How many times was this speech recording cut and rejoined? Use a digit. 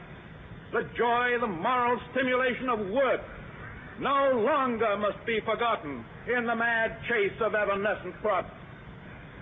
0